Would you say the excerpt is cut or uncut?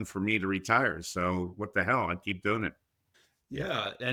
uncut